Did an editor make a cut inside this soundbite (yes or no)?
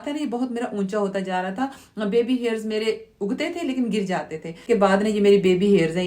yes